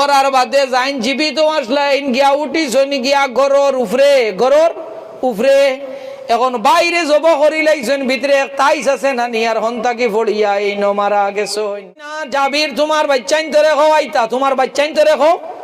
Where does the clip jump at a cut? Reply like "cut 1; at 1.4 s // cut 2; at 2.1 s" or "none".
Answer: cut 1; at 12.2 s

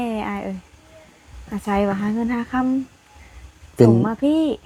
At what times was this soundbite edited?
none

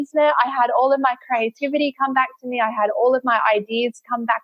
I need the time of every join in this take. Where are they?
none

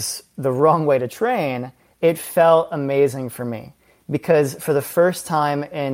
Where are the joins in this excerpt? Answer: none

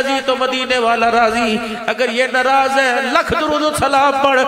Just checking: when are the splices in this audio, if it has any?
none

